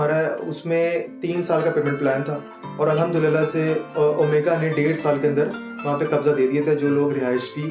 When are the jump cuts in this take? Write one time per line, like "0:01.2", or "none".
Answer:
none